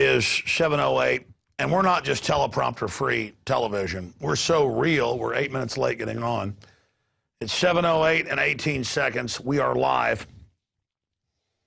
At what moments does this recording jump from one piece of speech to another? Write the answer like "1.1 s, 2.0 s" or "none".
2.0 s